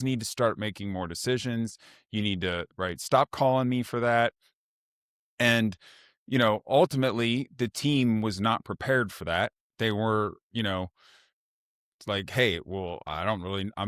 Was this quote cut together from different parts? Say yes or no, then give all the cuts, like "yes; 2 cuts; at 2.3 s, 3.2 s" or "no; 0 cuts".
no; 0 cuts